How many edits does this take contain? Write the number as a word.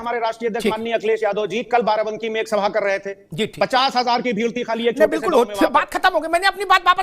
zero